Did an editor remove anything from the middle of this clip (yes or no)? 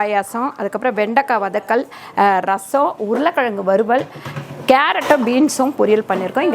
no